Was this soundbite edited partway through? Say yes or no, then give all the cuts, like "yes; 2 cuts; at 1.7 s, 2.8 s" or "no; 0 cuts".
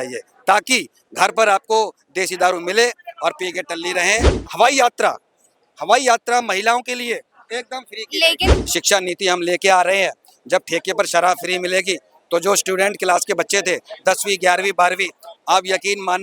yes; 2 cuts; at 4.4 s, 8.5 s